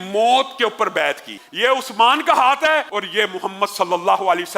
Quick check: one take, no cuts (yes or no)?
no